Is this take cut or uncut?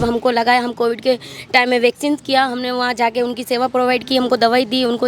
uncut